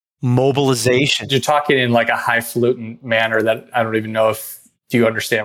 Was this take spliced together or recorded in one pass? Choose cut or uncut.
uncut